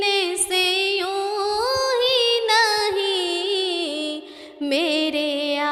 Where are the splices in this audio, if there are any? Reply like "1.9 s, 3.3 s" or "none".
none